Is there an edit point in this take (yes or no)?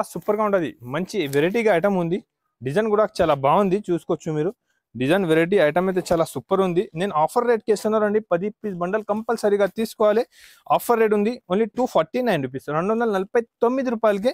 no